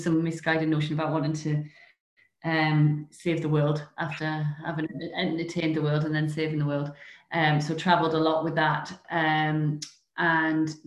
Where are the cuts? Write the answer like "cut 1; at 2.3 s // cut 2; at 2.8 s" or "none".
none